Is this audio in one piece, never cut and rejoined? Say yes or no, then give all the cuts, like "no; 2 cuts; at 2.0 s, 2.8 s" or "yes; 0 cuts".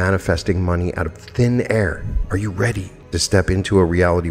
no; 2 cuts; at 2.1 s, 2.9 s